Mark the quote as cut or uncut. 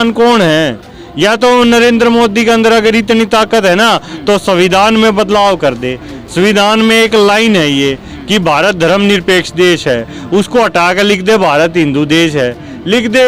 uncut